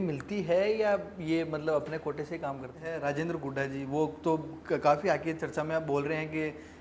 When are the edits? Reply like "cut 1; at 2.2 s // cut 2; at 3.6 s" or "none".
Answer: cut 1; at 2.8 s